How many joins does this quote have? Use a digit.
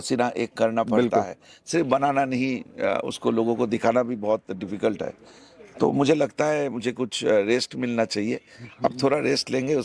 0